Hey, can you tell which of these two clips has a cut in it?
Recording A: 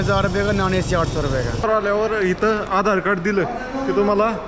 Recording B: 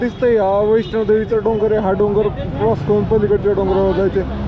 A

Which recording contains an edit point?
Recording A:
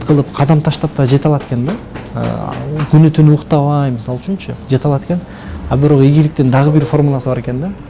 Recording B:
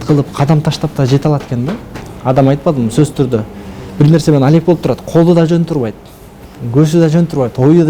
B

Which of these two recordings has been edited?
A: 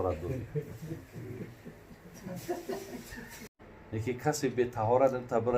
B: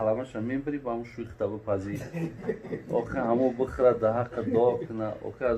A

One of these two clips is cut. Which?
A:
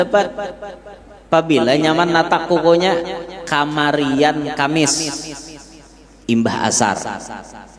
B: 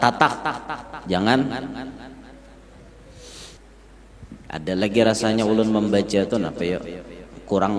B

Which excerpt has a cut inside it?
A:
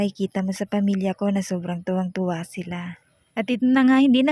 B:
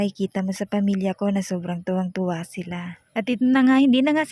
B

